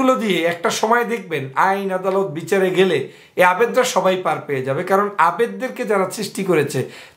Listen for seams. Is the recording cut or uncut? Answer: uncut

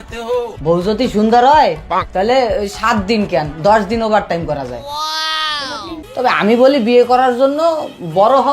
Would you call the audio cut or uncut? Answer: cut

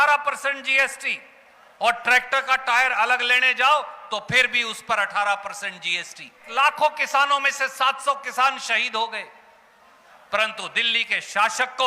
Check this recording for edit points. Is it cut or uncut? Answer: cut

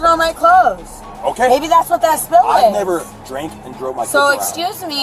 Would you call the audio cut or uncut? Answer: uncut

